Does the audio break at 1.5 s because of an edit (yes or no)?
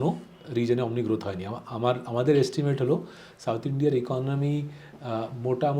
no